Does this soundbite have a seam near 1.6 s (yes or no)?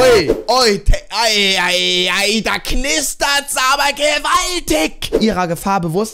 no